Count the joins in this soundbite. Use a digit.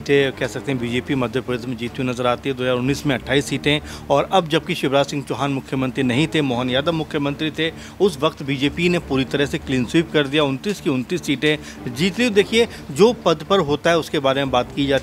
0